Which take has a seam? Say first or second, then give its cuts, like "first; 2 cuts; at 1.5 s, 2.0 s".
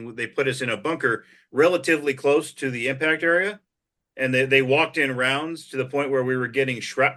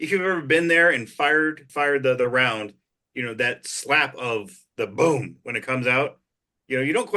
second; 1 cut; at 1.6 s